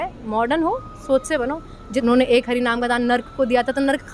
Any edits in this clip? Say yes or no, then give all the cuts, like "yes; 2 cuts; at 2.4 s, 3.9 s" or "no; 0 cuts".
yes; 1 cut; at 2.0 s